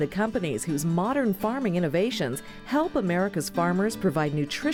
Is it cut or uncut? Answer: uncut